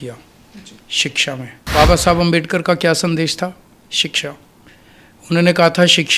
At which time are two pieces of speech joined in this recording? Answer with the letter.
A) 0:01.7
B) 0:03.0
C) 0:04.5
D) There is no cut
A